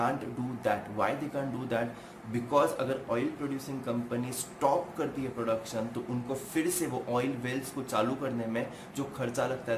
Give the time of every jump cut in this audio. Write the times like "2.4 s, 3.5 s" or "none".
none